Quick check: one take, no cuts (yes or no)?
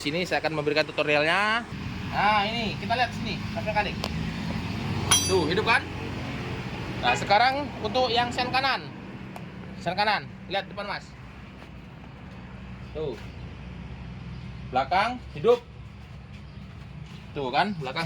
no